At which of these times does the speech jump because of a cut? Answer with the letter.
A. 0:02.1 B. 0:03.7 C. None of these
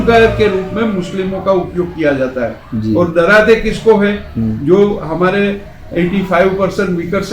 C